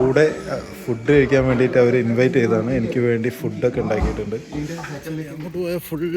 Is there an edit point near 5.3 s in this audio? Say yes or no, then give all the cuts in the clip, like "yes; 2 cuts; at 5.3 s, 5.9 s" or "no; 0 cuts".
yes; 1 cut; at 5.3 s